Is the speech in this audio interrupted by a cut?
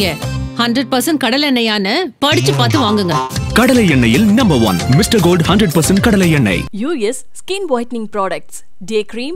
no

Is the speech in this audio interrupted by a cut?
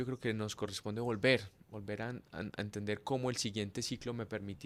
no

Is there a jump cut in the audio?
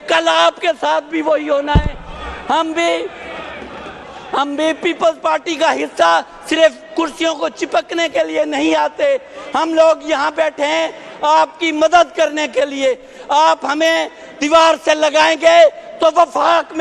no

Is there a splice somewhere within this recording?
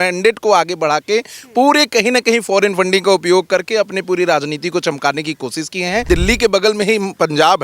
yes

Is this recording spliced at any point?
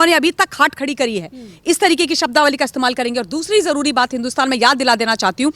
no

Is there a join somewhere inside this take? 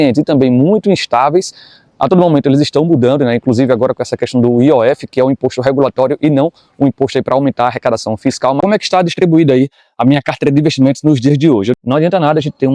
yes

